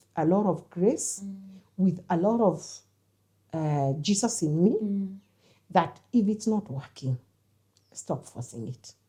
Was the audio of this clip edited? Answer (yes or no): no